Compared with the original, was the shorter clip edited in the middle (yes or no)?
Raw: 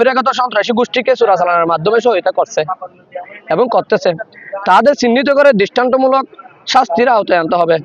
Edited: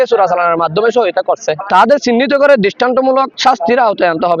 yes